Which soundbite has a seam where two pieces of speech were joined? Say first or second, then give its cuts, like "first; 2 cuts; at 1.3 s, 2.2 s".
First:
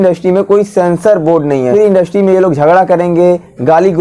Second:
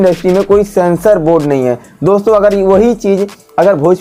first; 1 cut; at 1.7 s